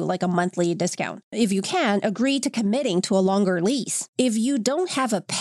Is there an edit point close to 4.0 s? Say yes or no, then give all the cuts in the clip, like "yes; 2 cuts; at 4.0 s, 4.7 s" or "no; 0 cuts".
yes; 2 cuts; at 1.3 s, 4.0 s